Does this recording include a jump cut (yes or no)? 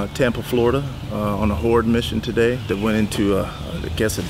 yes